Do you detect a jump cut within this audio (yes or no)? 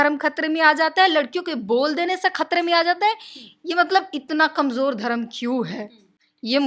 no